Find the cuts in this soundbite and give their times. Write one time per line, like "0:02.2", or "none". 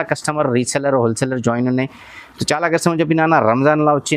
none